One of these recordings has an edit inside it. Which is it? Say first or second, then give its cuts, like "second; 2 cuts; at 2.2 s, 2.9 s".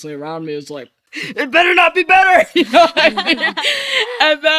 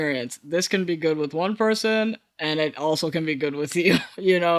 first; 1 cut; at 1.0 s